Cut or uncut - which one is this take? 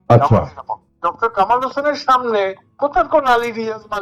cut